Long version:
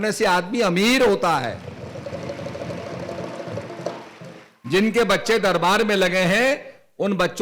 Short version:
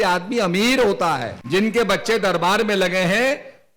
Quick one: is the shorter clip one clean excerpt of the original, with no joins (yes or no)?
no